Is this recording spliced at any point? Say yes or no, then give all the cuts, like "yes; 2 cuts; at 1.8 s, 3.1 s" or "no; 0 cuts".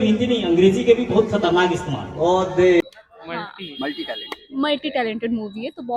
yes; 1 cut; at 2.8 s